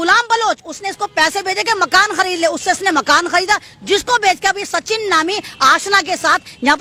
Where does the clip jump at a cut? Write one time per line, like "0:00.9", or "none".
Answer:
none